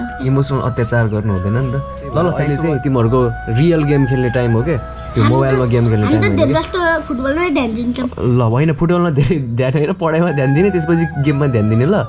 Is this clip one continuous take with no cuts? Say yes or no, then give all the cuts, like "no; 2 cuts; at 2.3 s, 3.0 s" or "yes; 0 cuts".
no; 1 cut; at 2.4 s